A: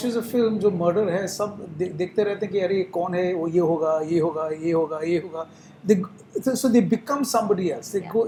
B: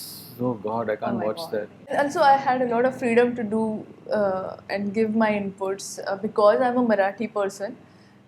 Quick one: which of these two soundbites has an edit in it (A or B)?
B